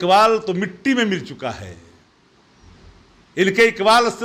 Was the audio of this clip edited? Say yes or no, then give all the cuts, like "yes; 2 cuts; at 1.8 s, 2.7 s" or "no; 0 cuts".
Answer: no; 0 cuts